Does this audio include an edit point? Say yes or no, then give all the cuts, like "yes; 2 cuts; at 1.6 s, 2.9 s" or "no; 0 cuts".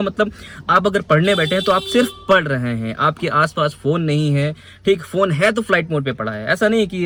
no; 0 cuts